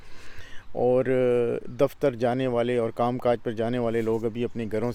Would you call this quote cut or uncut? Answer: uncut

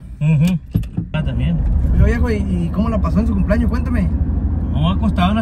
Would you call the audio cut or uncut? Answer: cut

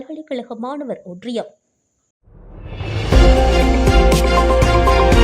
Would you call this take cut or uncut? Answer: cut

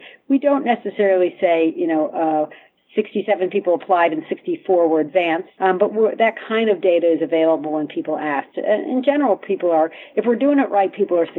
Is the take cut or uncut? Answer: cut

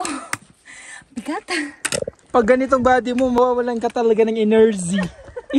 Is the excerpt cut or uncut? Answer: cut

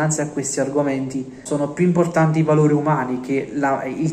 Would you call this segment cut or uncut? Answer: cut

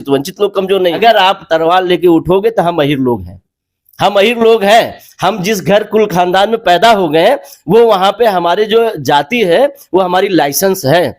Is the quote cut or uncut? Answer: cut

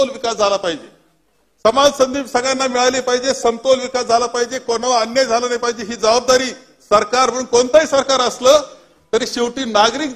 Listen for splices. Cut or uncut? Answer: uncut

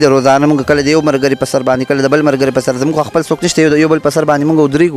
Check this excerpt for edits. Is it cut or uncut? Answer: uncut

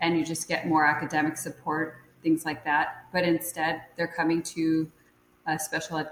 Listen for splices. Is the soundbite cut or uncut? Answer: uncut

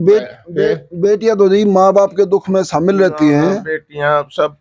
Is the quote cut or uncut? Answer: uncut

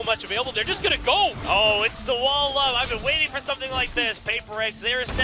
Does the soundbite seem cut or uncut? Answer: uncut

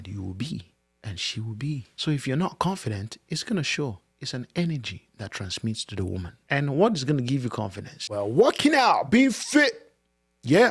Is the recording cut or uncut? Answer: uncut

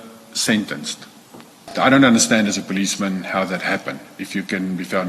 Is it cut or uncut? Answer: cut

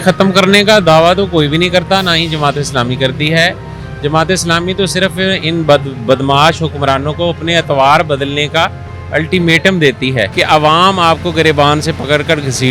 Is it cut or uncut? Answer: cut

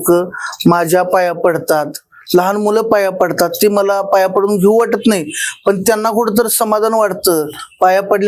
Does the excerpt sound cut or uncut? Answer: uncut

